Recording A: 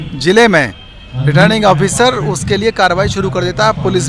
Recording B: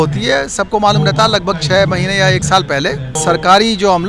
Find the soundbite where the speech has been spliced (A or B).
B